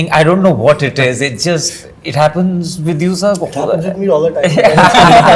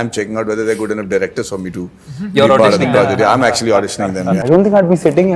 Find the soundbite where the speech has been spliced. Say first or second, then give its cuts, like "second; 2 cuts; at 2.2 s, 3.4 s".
second; 1 cut; at 4.4 s